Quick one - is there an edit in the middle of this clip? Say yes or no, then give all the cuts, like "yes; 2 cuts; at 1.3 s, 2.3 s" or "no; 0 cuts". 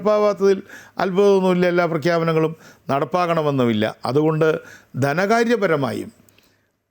no; 0 cuts